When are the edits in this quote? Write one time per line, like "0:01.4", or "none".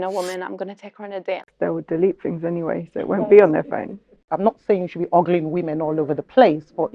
0:01.5
0:04.3